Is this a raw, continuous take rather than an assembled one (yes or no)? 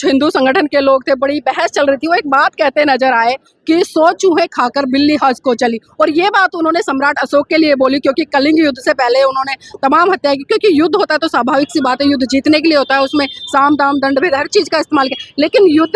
yes